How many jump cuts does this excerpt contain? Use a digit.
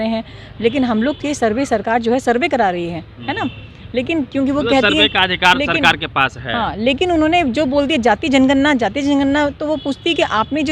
0